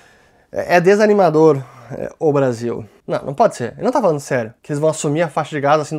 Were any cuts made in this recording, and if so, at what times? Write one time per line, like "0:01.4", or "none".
0:02.9
0:04.6